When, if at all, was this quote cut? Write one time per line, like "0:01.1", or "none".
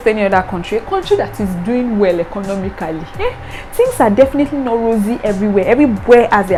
none